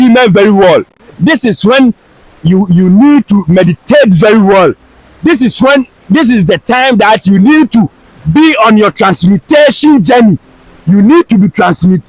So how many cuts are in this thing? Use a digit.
0